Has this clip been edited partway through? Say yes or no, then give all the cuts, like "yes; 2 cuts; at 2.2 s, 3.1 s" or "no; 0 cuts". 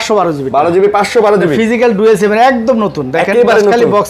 no; 0 cuts